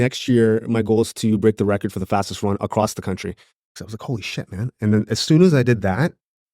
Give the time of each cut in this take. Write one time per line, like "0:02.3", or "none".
0:03.8